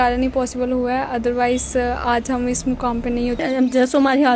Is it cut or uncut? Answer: cut